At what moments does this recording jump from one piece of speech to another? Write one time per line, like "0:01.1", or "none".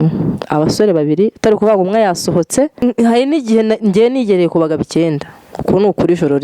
0:02.8

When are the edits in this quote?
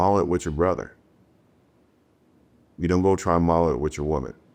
none

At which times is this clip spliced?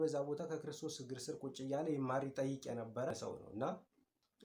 0:03.1

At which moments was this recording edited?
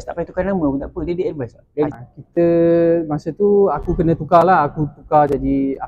0:01.9

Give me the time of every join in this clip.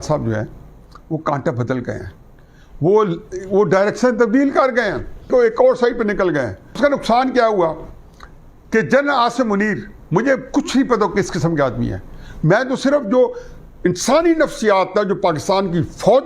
0:06.8

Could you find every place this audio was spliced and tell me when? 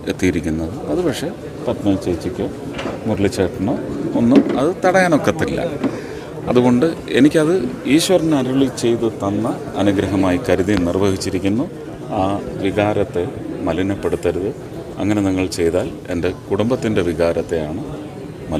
none

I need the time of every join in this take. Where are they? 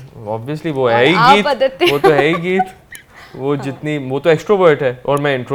none

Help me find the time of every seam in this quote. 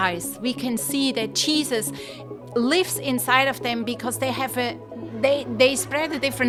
none

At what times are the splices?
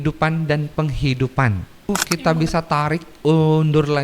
0:01.9

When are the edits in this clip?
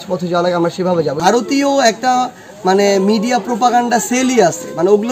0:01.2

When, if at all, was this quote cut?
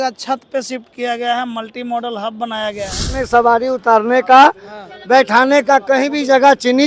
0:03.1

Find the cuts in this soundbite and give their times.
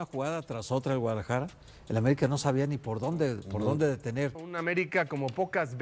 0:04.5

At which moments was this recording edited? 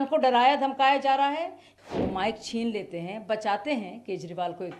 0:01.6

